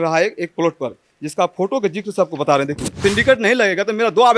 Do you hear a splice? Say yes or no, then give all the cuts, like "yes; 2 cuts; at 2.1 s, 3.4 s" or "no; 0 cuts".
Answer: yes; 1 cut; at 2.9 s